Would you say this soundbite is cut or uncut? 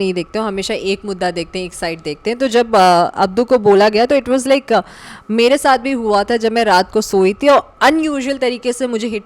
uncut